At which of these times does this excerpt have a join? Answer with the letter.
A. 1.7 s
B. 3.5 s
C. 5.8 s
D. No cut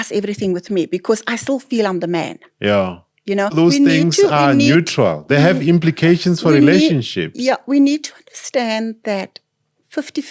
B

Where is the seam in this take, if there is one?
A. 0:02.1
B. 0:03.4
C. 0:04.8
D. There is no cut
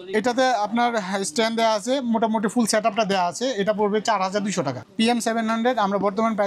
C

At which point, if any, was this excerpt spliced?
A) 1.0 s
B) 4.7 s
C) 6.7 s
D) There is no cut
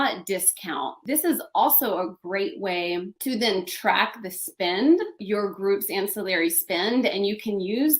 A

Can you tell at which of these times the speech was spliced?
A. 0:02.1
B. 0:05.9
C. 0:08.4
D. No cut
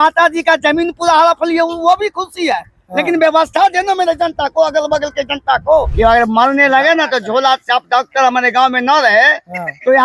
B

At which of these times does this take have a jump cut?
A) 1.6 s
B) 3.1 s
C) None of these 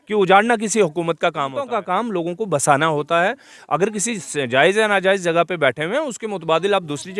A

